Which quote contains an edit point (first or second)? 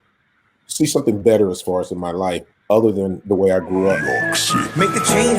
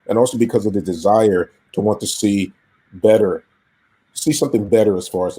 first